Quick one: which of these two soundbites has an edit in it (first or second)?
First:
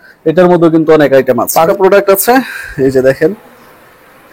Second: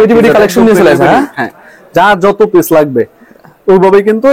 first